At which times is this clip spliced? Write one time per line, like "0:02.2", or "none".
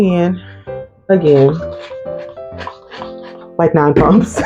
none